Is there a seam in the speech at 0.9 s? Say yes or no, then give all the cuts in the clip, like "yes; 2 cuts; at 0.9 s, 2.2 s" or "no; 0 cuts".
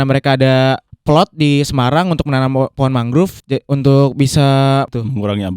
yes; 2 cuts; at 0.9 s, 3.4 s